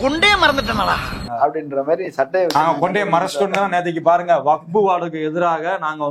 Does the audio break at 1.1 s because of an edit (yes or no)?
no